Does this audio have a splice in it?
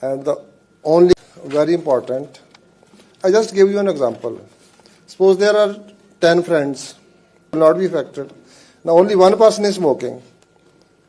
yes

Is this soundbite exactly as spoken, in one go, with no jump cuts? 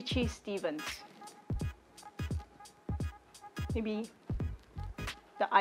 yes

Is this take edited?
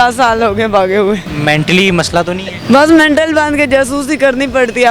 yes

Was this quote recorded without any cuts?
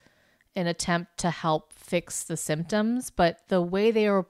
yes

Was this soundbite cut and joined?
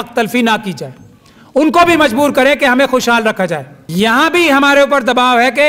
yes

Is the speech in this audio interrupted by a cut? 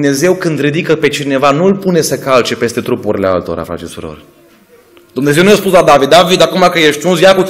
yes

